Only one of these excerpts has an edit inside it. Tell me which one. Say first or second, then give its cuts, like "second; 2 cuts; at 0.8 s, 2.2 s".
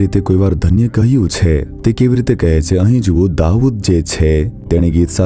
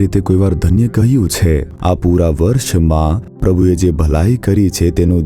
second; 2 cuts; at 1.7 s, 3.3 s